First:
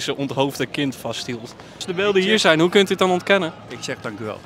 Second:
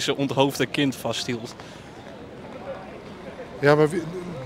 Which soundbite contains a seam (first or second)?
first